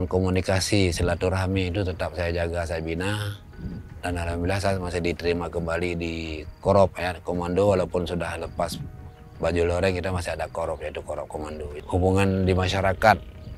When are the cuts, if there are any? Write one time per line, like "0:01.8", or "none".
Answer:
none